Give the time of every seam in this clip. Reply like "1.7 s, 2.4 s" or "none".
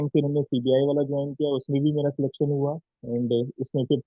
2.9 s